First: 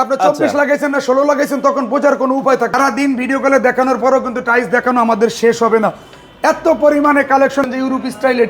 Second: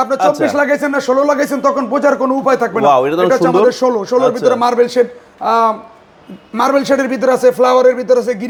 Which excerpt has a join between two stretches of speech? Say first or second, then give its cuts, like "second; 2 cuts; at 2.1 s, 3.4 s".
first; 2 cuts; at 2.7 s, 7.6 s